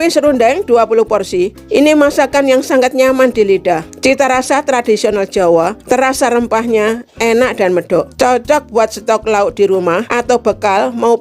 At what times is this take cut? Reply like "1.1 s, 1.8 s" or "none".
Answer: 1.6 s, 3.9 s, 5.8 s, 8.1 s, 10.1 s

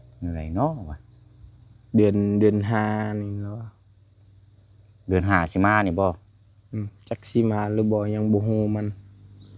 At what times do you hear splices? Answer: none

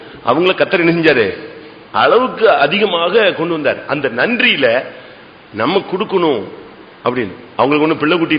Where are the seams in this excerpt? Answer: none

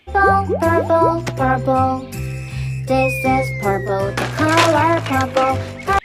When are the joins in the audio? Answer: none

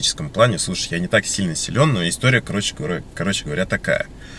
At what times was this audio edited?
none

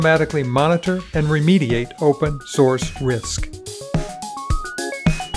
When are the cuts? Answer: 3.4 s

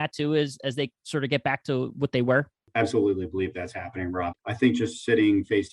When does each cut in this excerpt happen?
2.6 s, 4.3 s

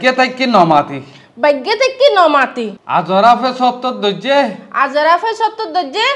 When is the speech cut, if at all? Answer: none

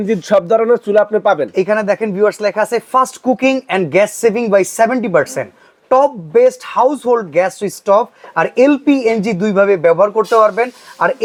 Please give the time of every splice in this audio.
none

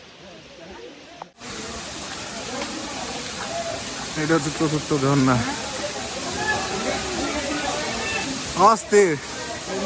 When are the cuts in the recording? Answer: 1.5 s

